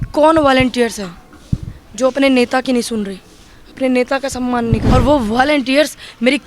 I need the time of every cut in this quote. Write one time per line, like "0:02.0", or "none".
0:04.8